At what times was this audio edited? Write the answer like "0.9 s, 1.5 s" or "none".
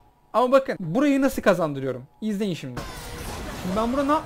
3.0 s